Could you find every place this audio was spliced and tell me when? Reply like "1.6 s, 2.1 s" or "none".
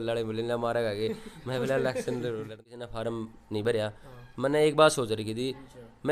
2.6 s